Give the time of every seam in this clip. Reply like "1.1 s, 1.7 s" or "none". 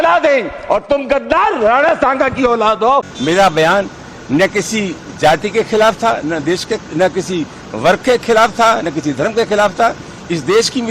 3.1 s